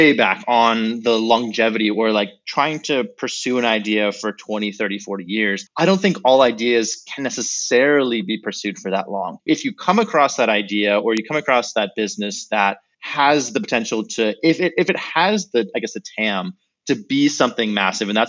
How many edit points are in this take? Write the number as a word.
one